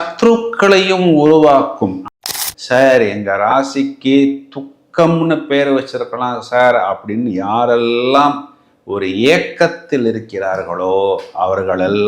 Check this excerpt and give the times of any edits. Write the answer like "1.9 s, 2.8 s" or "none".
2.1 s